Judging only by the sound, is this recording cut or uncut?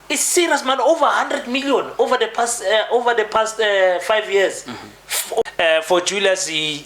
cut